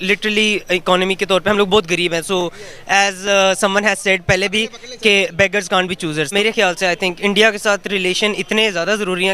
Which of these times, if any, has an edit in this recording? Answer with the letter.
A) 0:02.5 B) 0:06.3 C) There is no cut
B